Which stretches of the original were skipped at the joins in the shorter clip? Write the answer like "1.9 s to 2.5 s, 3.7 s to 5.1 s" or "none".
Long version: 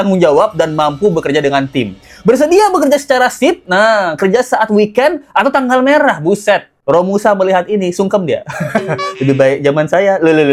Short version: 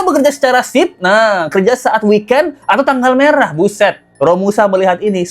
none

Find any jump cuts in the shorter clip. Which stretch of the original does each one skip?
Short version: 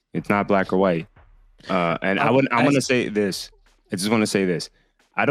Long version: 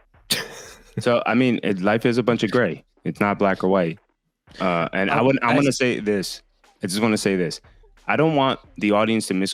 none

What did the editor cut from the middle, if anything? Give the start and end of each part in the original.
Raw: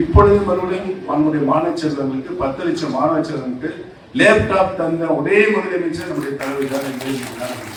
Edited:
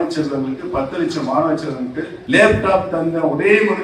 3.8 s to 4.0 s

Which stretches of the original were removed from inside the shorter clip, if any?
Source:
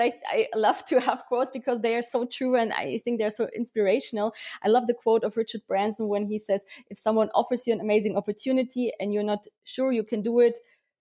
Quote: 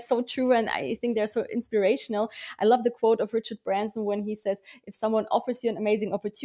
none

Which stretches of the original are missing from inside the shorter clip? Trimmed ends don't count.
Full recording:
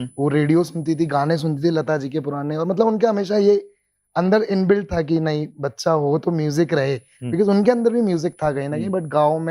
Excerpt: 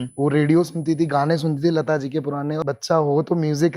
2.6 s to 5.5 s

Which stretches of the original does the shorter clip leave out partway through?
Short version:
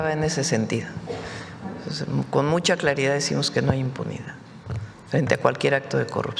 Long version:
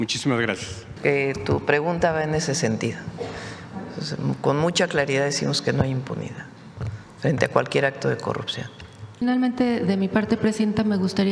none

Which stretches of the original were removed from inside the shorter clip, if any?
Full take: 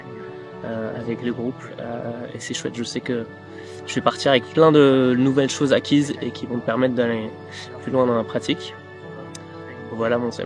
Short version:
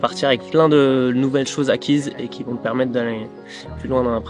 none

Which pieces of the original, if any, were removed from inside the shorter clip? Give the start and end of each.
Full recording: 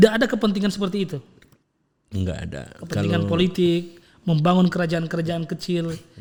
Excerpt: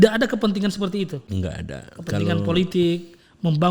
1.2 s to 2.0 s

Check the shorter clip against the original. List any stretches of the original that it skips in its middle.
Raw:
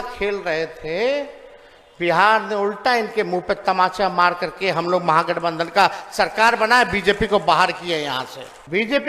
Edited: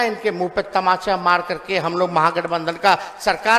none

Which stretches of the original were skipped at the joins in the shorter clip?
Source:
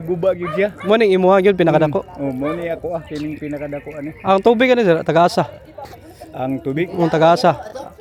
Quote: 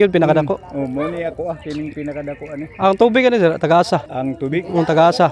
5.6 s to 6.4 s

